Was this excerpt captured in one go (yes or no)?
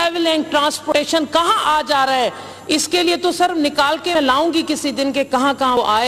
yes